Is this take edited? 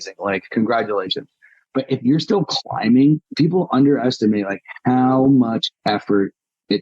yes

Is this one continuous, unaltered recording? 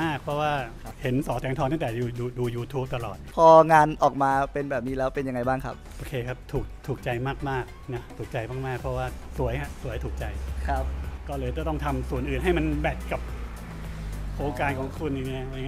no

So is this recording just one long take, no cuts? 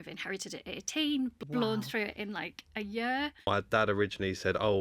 no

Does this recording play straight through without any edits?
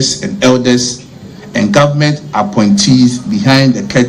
yes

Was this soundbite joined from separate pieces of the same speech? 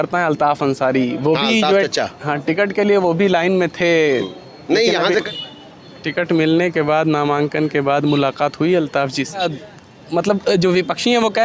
yes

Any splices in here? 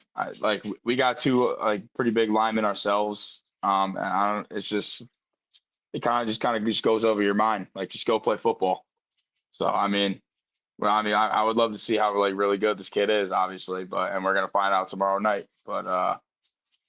no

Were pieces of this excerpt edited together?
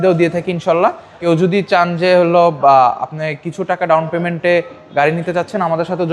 yes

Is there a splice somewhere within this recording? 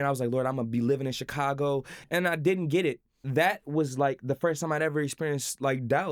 yes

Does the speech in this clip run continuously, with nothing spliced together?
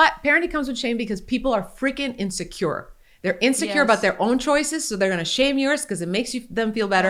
yes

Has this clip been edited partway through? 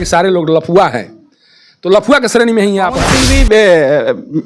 yes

